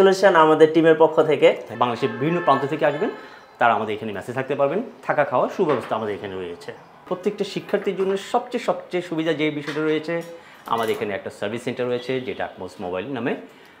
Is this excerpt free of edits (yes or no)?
no